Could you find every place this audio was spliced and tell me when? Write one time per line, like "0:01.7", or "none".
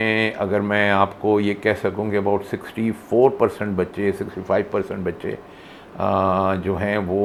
none